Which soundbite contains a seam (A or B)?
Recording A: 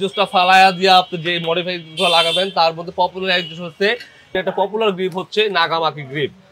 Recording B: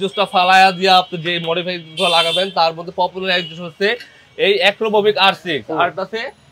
A